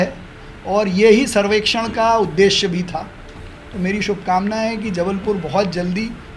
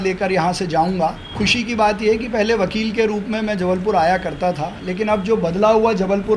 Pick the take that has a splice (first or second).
second